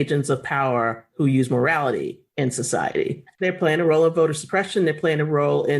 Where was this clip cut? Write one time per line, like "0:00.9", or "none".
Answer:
0:03.3